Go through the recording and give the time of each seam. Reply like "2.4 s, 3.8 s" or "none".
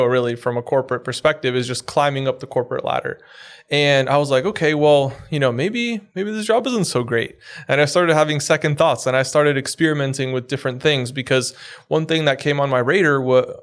none